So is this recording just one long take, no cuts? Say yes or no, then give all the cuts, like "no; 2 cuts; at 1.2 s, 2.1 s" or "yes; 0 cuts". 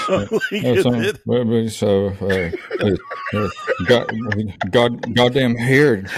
yes; 0 cuts